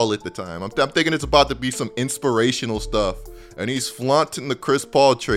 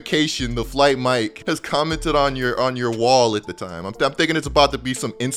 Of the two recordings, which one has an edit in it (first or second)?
second